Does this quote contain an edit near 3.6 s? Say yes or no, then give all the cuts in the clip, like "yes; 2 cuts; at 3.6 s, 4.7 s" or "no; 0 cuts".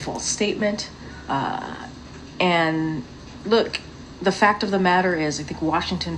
yes; 1 cut; at 3.6 s